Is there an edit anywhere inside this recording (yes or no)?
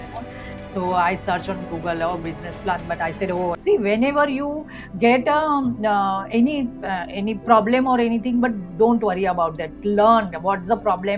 yes